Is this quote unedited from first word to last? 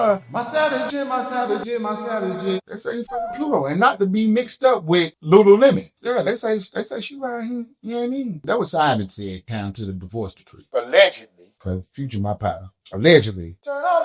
no; 1 cut; at 8.4 s

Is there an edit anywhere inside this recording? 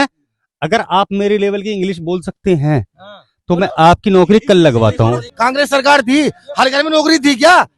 yes; 1 cut; at 5.3 s

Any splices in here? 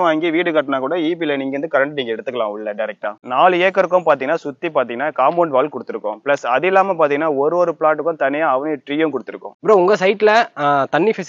no; 0 cuts

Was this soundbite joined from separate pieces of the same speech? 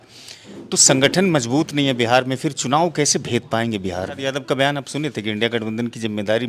yes; 1 cut; at 4.2 s

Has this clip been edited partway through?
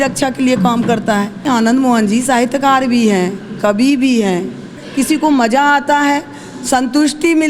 yes; 2 cuts; at 1.5 s, 4.8 s

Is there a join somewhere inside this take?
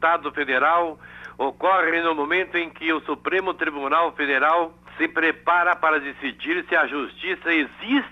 yes; 1 cut; at 4.8 s

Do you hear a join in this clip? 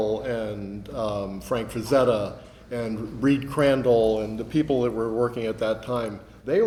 no; 0 cuts

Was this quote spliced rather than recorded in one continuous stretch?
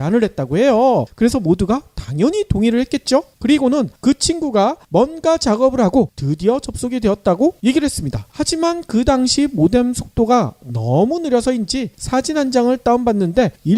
no; 0 cuts

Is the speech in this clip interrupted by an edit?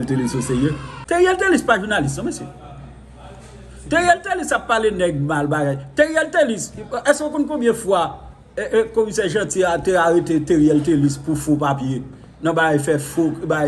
yes; 1 cut; at 0.9 s

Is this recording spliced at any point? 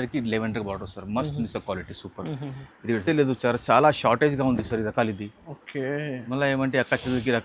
yes; 1 cut; at 3.0 s

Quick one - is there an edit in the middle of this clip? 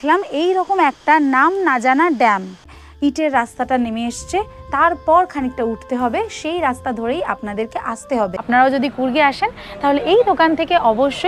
yes; 2 cuts; at 2.7 s, 8.4 s

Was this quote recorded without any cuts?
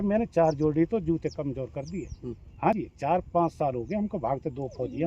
yes; 0 cuts

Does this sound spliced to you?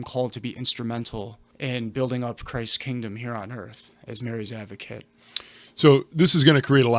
yes; 1 cut; at 1.4 s

